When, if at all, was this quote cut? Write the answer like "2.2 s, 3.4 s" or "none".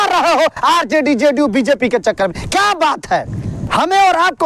3.5 s